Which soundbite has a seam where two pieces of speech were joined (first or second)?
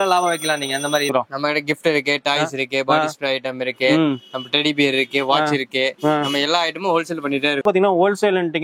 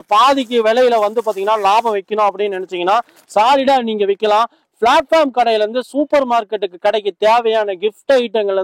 first